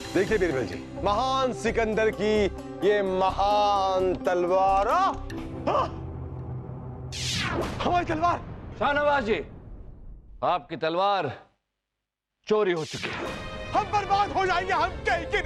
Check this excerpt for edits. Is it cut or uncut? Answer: cut